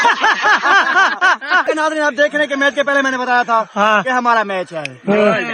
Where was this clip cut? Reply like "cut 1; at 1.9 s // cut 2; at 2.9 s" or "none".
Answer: cut 1; at 1.6 s